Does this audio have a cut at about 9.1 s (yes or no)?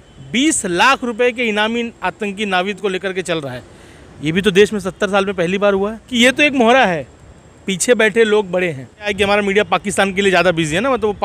yes